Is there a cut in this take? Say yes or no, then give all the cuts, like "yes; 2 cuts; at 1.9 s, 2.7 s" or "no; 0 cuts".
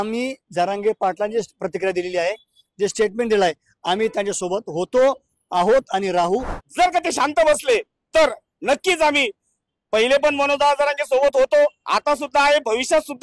yes; 1 cut; at 6.6 s